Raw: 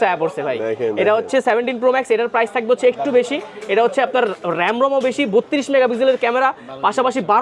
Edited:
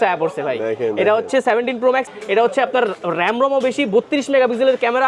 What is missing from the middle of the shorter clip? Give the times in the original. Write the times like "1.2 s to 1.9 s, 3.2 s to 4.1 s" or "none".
2.0 s to 3.4 s